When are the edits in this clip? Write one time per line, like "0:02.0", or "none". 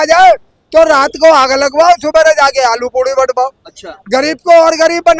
none